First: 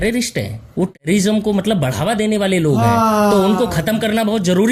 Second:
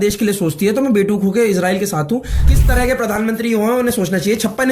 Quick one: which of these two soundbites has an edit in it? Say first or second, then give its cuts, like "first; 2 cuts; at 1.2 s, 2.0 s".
second; 1 cut; at 2.4 s